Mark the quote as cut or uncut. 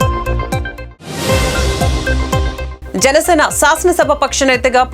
cut